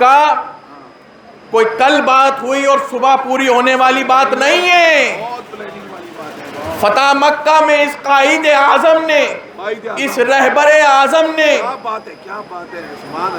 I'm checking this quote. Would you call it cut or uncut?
uncut